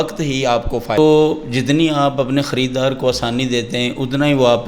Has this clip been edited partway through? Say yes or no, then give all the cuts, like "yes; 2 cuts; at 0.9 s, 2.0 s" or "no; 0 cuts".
yes; 1 cut; at 1.0 s